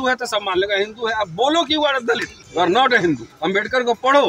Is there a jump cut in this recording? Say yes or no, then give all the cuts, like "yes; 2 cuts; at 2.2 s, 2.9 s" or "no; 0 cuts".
yes; 2 cuts; at 2.4 s, 3.3 s